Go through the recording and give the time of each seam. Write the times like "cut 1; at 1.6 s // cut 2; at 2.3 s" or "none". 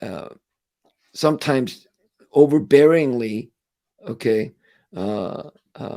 none